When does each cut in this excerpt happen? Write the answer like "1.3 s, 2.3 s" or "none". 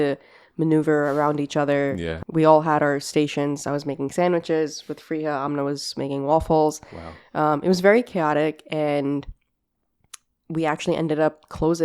2.2 s